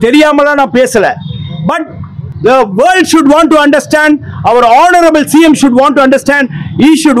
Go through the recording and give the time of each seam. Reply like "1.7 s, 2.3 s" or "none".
none